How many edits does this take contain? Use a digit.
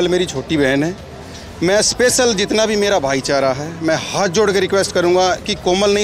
0